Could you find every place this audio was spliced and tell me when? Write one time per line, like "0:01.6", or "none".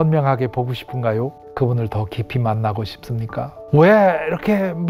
0:01.4
0:03.6